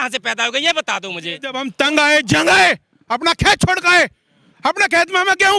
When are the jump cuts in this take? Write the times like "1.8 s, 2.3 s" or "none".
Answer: 1.6 s